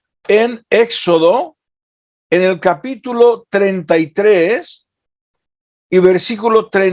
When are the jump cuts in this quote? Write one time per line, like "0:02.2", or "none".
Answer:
none